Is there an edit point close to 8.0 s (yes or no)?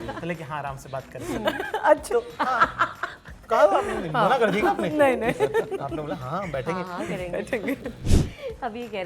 yes